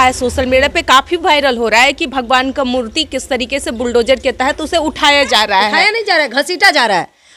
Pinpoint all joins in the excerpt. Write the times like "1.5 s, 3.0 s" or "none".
none